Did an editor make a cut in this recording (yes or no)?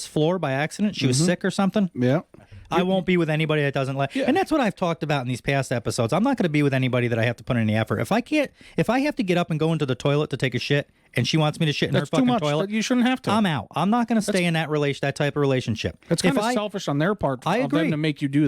yes